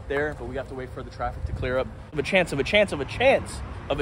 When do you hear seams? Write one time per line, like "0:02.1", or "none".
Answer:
0:02.1